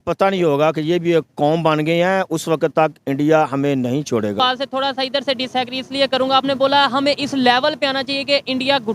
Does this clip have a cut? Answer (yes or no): yes